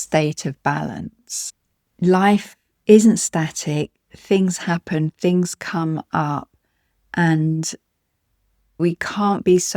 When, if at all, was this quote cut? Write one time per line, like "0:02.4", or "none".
0:08.8